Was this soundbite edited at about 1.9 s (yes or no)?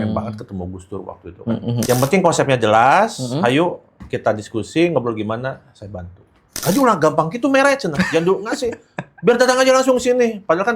yes